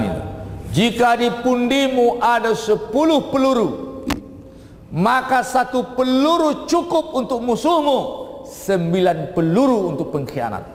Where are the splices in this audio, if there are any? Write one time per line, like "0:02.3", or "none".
none